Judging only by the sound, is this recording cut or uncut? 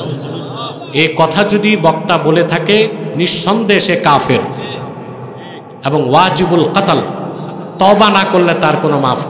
uncut